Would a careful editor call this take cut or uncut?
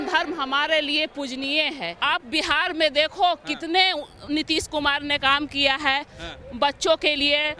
cut